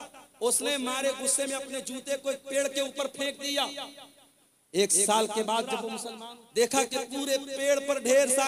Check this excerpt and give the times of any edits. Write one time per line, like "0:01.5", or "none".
0:06.0